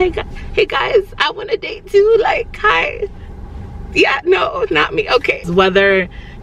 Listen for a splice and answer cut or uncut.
cut